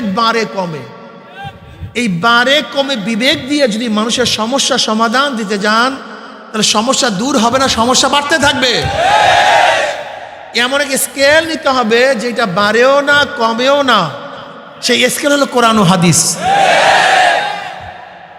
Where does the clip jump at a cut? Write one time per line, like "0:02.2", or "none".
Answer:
none